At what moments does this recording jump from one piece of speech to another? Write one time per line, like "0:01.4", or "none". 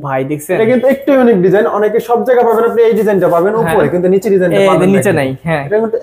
none